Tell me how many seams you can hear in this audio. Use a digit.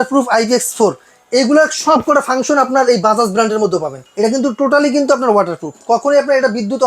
1